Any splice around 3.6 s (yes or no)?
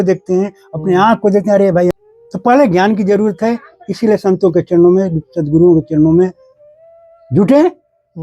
no